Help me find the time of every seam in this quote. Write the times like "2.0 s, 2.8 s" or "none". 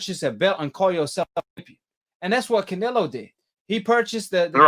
3.5 s